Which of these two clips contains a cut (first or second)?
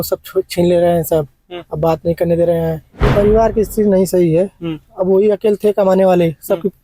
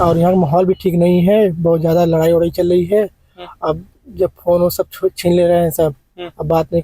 first